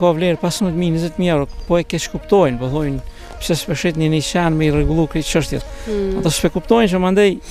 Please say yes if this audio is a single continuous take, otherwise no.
yes